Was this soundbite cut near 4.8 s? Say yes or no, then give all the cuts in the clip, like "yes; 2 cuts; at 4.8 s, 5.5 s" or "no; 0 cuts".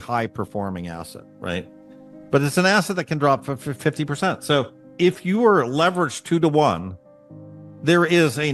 yes; 1 cut; at 4.8 s